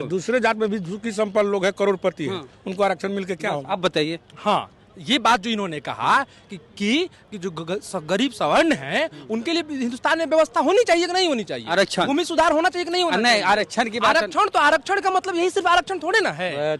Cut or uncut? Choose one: uncut